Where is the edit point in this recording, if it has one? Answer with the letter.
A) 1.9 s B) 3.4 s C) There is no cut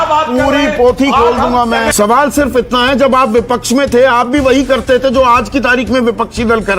A